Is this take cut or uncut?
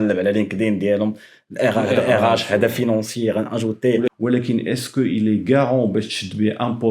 cut